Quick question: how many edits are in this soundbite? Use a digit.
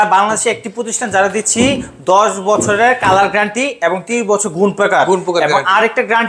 0